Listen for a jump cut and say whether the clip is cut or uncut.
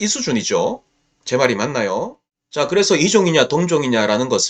cut